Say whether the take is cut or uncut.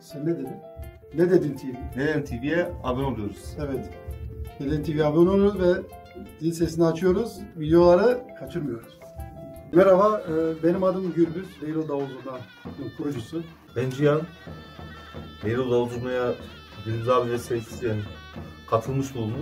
cut